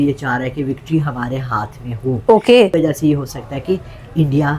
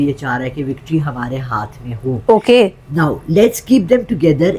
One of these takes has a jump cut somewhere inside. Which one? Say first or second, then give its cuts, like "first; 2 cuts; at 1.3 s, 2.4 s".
first; 1 cut; at 2.7 s